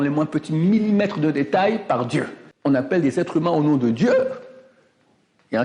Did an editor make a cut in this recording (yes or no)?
yes